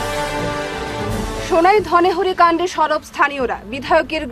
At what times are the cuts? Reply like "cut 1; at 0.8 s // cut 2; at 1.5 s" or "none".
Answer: cut 1; at 1.2 s